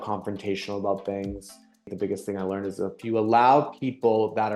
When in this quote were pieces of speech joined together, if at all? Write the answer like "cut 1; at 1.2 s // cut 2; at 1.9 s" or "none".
cut 1; at 1.6 s